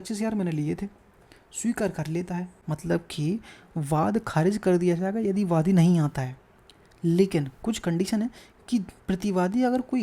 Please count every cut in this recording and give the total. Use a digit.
1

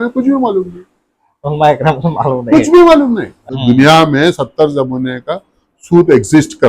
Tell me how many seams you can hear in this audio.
1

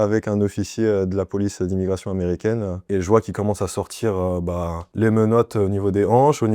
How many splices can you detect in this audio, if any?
1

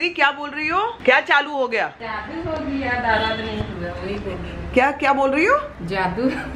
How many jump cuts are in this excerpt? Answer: 2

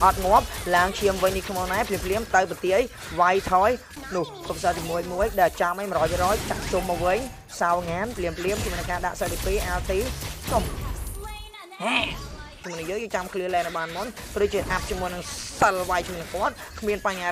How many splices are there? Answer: 2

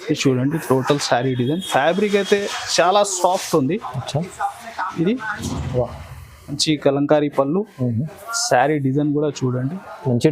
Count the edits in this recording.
1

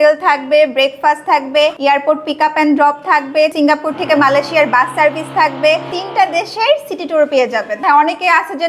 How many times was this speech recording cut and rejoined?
4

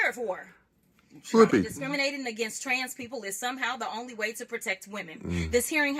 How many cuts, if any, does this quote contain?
1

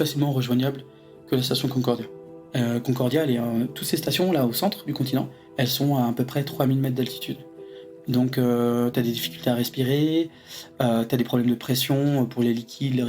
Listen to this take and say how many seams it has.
2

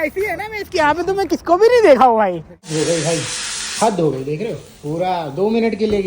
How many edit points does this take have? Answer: 1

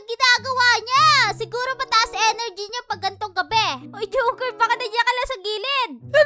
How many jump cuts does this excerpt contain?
1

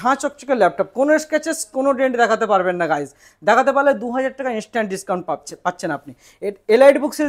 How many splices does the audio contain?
0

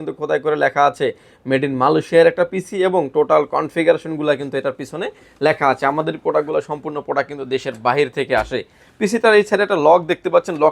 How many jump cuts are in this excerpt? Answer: 0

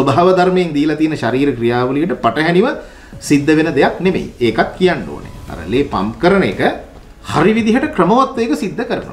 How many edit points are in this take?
0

